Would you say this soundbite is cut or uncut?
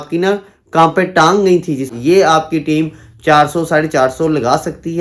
cut